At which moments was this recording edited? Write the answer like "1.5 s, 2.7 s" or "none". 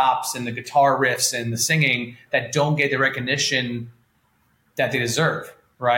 none